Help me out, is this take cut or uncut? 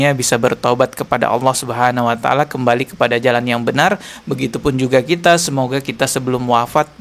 uncut